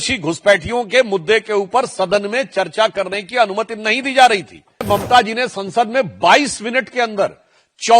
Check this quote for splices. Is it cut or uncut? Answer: cut